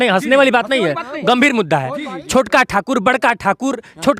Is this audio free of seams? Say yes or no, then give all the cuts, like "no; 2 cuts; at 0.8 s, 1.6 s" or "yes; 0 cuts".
yes; 0 cuts